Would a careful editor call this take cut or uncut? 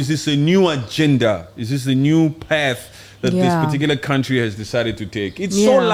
uncut